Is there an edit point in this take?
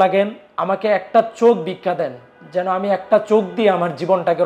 no; 0 cuts

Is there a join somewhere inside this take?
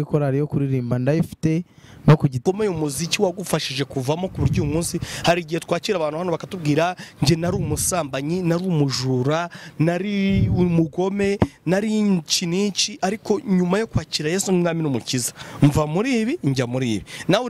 yes; 1 cut; at 2.4 s

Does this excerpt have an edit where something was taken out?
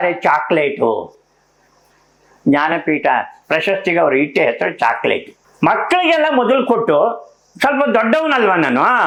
no; 0 cuts

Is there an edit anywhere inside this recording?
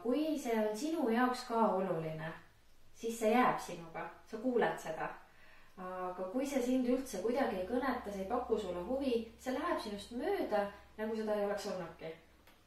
no; 0 cuts

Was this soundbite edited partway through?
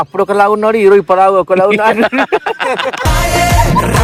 no; 0 cuts

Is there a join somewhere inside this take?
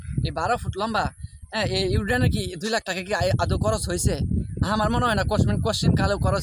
no; 0 cuts

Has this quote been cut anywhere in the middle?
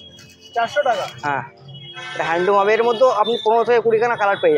no; 0 cuts

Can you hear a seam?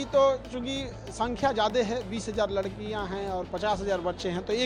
no; 0 cuts

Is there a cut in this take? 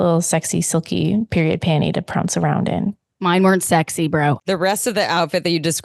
yes; 1 cut; at 4.4 s

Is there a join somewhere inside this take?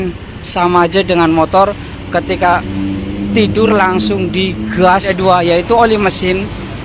yes; 1 cut; at 5.1 s

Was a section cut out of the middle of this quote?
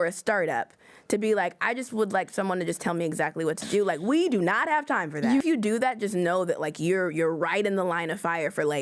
yes; 1 cut; at 5.4 s

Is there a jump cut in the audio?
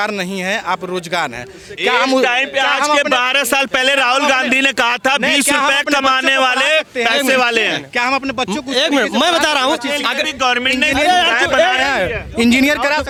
no; 0 cuts

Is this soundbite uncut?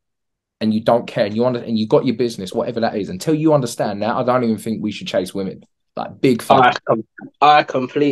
yes; 0 cuts

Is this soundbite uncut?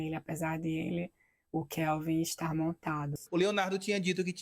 no; 1 cut; at 3.1 s

